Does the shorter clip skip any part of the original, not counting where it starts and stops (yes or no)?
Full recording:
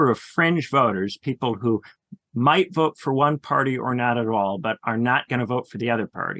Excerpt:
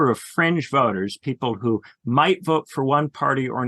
yes